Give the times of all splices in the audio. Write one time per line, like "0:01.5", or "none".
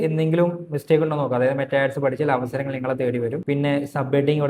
0:03.4